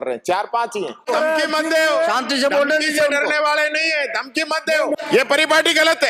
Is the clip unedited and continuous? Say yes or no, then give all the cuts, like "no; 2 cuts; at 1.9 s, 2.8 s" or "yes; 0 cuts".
no; 2 cuts; at 1.1 s, 5.0 s